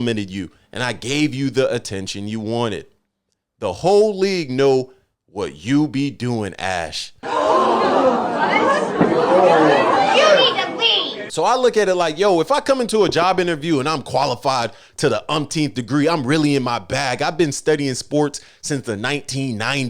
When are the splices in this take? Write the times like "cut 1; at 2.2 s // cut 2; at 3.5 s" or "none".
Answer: cut 1; at 11.2 s